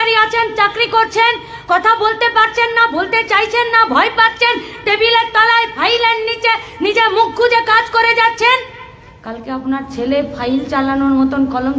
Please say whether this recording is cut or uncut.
uncut